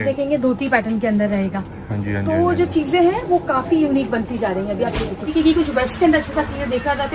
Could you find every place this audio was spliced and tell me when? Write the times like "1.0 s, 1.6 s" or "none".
5.3 s